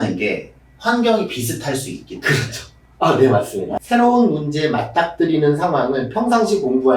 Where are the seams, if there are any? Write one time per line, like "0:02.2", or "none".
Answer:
0:03.8